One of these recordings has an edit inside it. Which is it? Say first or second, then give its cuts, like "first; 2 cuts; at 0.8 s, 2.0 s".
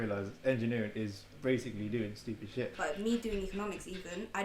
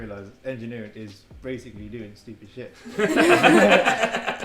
first; 1 cut; at 2.7 s